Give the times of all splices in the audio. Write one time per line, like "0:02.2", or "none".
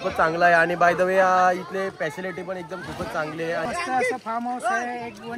0:03.6